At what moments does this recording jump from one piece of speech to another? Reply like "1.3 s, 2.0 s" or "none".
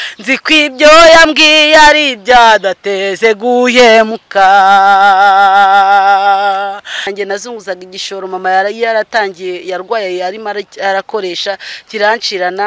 7.1 s